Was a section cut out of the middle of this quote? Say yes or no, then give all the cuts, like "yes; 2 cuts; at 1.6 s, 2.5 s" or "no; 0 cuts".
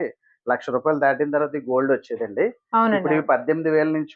no; 0 cuts